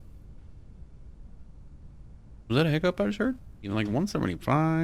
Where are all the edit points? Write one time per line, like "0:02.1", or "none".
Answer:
0:03.7